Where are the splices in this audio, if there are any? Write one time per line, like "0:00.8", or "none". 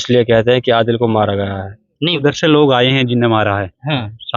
0:02.2